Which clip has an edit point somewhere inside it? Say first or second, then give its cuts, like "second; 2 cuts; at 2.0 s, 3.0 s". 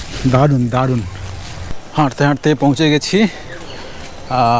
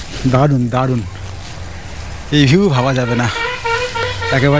first; 1 cut; at 1.9 s